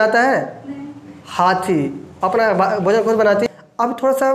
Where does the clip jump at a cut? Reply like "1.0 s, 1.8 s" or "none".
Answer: 3.5 s